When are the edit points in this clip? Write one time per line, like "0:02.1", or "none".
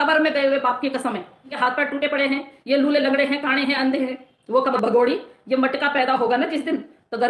0:01.6
0:04.7